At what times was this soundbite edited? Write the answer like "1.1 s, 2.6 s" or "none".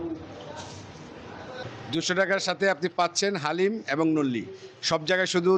1.6 s